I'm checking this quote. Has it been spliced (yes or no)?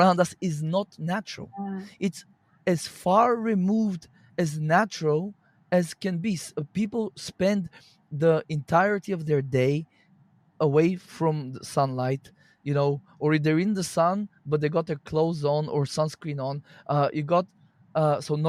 no